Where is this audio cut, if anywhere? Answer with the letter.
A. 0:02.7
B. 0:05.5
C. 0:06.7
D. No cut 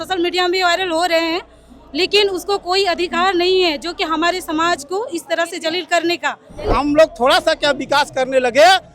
C